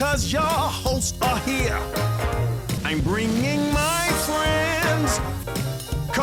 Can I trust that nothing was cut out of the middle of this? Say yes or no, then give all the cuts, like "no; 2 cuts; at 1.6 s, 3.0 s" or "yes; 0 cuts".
yes; 0 cuts